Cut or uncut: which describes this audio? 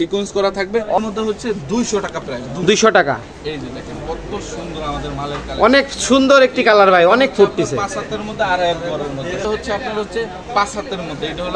cut